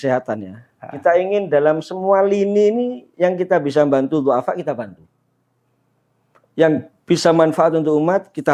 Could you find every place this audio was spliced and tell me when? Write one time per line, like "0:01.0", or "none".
none